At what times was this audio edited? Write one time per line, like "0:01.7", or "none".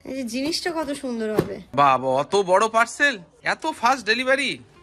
0:01.6